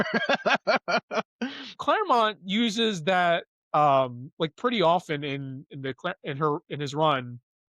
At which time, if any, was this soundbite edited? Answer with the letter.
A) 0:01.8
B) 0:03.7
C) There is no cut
A